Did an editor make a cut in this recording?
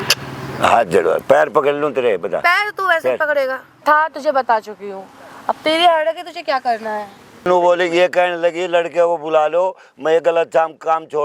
yes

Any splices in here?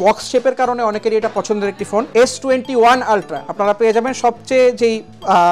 yes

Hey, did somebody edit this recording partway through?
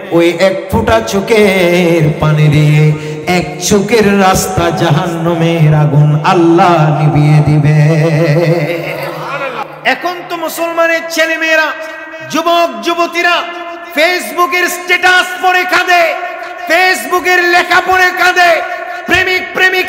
yes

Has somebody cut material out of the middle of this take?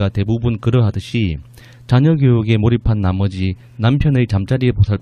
no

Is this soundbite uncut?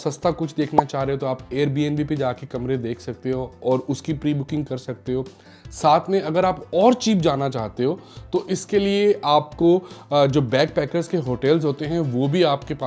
yes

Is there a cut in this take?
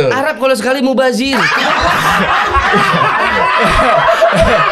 no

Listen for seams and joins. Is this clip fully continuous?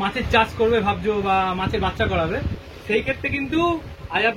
yes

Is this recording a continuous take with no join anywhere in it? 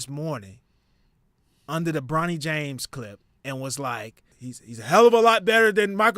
no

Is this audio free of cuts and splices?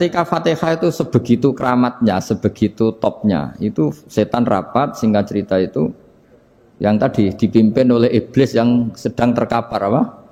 yes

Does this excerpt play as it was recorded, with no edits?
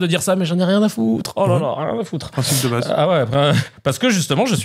yes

